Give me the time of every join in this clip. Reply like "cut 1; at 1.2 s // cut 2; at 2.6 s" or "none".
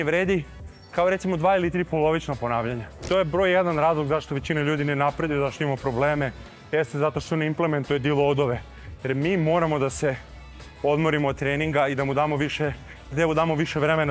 cut 1; at 3.0 s

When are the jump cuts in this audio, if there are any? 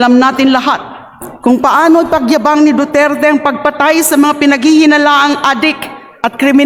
none

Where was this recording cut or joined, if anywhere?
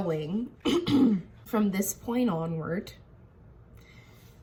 none

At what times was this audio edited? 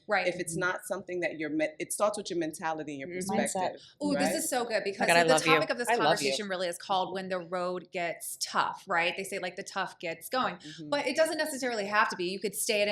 none

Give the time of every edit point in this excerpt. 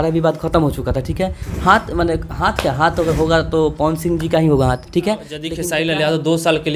cut 1; at 5.5 s

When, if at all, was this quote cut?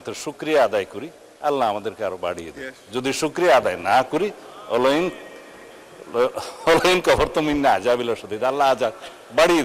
none

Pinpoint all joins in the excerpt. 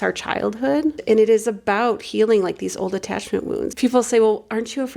cut 1; at 1.0 s // cut 2; at 3.7 s

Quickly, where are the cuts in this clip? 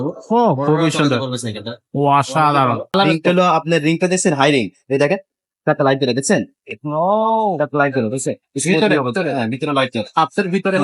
cut 1; at 2.9 s

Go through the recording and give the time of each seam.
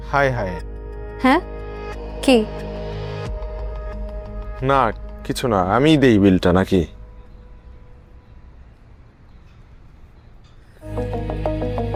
none

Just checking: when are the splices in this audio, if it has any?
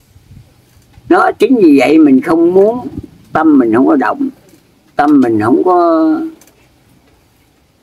none

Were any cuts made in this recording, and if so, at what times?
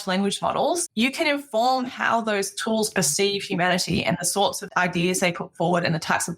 cut 1; at 0.9 s // cut 2; at 4.6 s

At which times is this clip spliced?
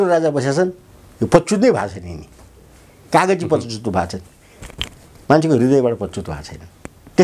none

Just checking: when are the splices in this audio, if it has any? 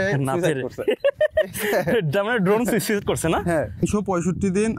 cut 1; at 3.8 s

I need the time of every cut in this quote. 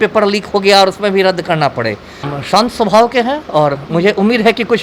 cut 1; at 2.3 s

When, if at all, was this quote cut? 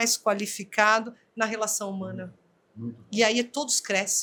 none

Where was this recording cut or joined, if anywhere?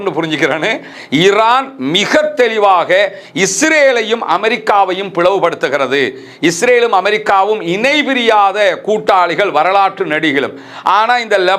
cut 1; at 0.9 s

